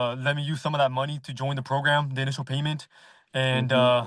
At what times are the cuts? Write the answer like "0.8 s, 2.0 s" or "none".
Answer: none